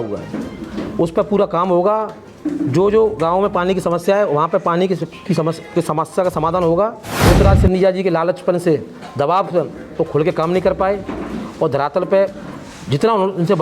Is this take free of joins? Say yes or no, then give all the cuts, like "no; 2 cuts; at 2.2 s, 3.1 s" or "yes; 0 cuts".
no; 1 cut; at 7.1 s